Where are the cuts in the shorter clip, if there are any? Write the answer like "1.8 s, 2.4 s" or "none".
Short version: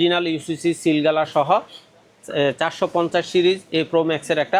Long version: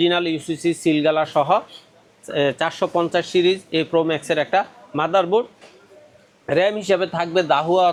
none